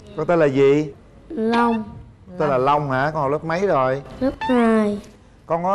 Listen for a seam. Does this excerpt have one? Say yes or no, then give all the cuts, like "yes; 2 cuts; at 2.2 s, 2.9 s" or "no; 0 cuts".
no; 0 cuts